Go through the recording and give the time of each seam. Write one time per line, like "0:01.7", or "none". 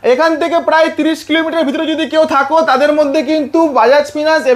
none

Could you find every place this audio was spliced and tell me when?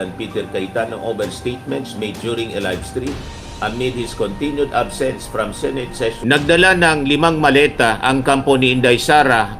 0:06.2

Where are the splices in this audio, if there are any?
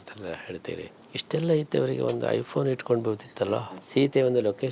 0:01.0
0:03.8

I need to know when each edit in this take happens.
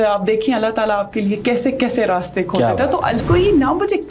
0:03.2

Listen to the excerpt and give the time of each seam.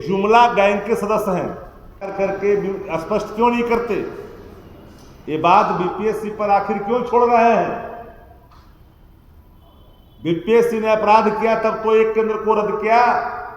0:02.0

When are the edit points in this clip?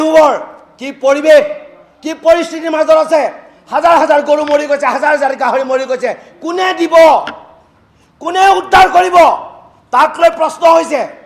none

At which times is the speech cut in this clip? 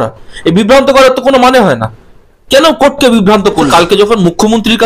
0:03.7

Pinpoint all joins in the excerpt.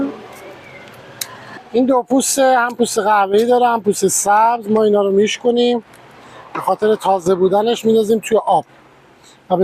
0:01.5

